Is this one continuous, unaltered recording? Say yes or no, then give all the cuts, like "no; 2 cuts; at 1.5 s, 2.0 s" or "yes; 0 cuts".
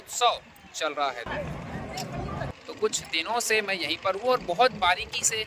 no; 1 cut; at 2.5 s